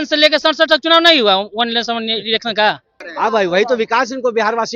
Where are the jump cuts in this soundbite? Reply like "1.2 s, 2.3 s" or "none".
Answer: 3.0 s